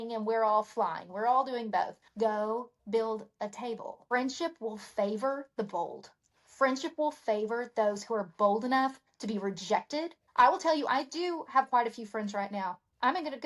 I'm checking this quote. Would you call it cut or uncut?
cut